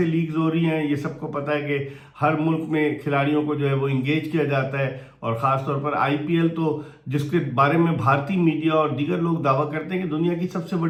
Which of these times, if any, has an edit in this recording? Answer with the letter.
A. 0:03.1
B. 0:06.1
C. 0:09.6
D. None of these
D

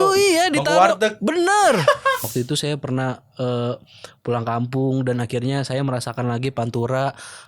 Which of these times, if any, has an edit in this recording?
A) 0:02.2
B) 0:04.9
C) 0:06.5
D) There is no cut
A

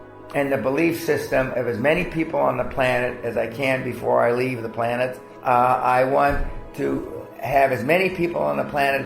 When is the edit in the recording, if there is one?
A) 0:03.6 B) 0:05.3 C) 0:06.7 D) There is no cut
B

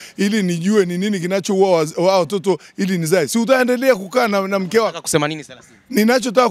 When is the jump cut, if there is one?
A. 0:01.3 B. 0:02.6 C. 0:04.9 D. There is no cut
D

